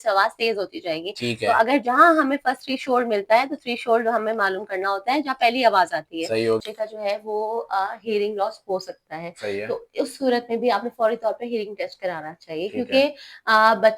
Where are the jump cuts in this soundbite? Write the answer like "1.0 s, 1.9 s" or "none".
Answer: 6.6 s